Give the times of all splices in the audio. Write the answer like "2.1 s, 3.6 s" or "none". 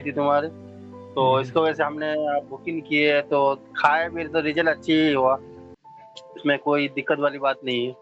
none